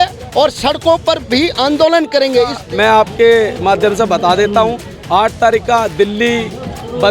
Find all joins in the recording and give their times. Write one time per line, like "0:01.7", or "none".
0:02.6